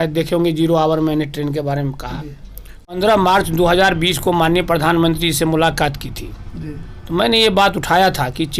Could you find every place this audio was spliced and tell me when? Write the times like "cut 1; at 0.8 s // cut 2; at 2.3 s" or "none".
cut 1; at 2.9 s